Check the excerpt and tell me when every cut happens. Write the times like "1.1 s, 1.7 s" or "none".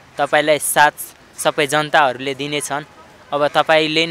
none